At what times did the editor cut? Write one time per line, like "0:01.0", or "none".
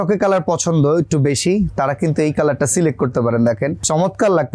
none